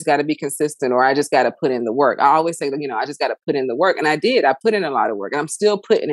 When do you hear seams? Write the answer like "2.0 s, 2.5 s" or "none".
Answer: none